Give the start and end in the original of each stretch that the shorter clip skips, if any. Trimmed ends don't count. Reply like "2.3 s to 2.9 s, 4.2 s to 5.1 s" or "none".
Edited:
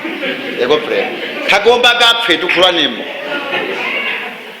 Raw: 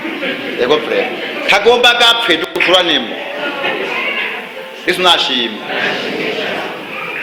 2.5 s to 2.6 s